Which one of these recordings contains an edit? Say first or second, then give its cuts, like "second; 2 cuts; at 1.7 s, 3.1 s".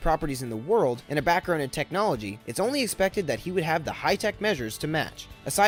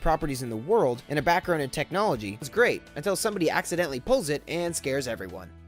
second; 1 cut; at 2.5 s